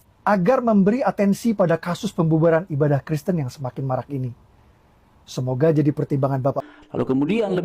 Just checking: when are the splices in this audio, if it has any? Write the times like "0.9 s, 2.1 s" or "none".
6.7 s

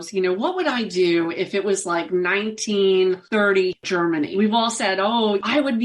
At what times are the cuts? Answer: 4.0 s

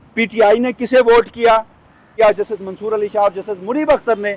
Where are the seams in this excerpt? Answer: 2.1 s

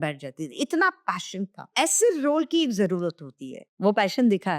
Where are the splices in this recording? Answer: 1.7 s

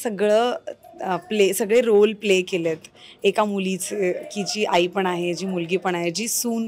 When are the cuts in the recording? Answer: none

